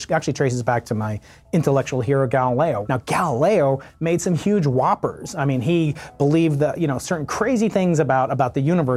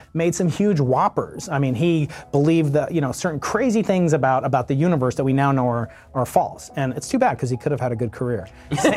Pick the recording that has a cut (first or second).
first